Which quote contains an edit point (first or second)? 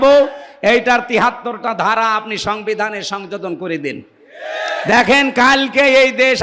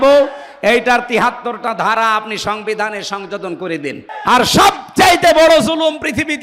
second